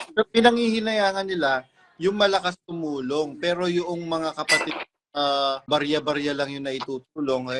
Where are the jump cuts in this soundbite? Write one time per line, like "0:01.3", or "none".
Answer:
0:05.7